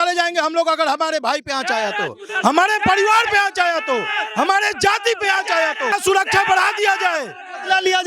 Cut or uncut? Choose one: uncut